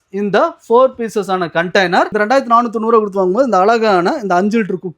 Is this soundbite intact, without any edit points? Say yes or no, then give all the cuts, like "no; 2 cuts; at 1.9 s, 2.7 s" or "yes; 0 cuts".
no; 1 cut; at 2.1 s